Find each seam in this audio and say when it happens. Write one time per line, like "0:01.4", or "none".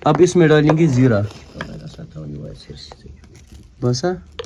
none